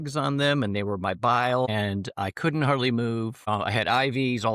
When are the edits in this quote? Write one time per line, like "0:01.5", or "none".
0:01.7
0:03.4